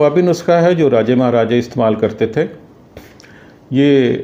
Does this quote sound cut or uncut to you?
uncut